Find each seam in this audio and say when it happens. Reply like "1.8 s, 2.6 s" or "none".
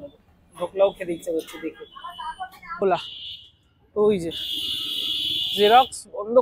2.8 s